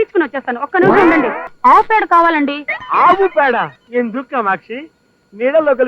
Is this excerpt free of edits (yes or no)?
no